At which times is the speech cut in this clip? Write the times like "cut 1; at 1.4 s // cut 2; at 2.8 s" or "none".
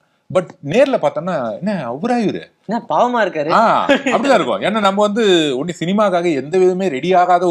none